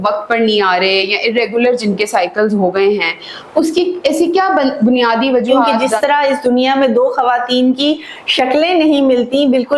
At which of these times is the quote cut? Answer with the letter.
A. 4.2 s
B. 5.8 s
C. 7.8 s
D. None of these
B